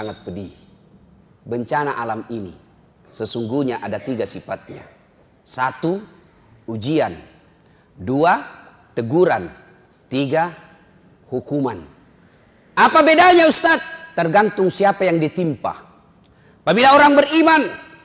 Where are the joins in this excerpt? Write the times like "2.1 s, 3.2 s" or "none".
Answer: none